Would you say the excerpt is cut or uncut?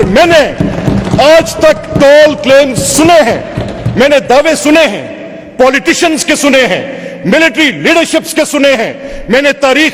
uncut